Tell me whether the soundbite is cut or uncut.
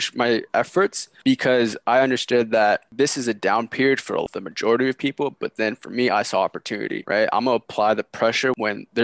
cut